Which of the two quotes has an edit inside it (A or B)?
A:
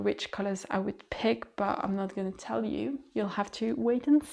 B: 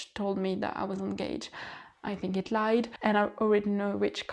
B